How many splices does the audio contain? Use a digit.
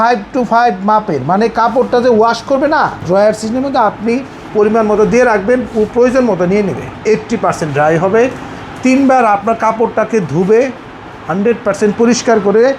2